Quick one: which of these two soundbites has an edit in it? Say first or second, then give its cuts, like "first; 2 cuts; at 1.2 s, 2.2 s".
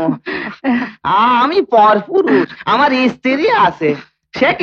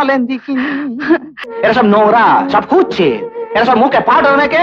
second; 1 cut; at 1.4 s